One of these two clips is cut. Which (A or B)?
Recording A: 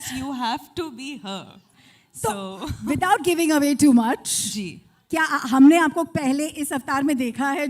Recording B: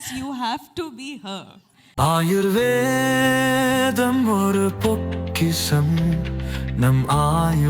B